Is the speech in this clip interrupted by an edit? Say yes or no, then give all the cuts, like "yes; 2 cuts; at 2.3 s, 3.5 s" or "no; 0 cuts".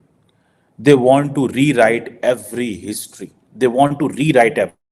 no; 0 cuts